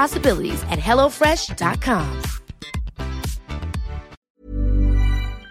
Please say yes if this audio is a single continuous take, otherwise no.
no